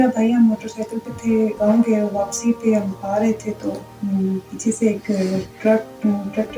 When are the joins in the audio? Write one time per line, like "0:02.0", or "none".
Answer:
0:01.5
0:03.9
0:05.5